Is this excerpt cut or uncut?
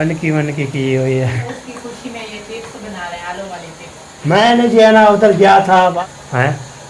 cut